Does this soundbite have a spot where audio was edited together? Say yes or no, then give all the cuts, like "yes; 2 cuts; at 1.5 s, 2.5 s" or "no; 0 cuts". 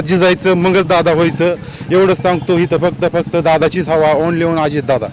no; 0 cuts